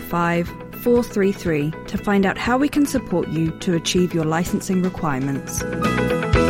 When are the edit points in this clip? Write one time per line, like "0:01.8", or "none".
0:05.6